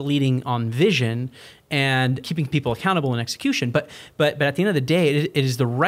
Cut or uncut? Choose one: cut